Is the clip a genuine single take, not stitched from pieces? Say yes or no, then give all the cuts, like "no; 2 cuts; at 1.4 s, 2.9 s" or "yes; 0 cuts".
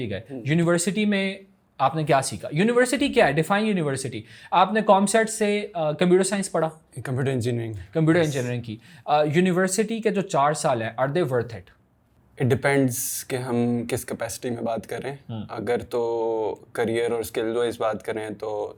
yes; 0 cuts